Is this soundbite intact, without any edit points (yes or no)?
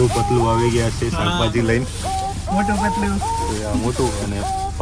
yes